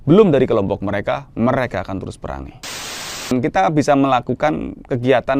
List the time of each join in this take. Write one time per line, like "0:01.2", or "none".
0:03.0